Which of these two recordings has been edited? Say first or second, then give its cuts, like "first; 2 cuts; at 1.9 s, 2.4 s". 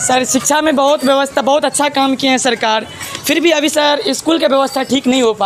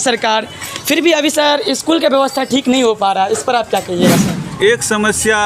second; 1 cut; at 4.4 s